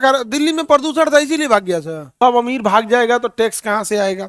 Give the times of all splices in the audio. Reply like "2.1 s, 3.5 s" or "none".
2.0 s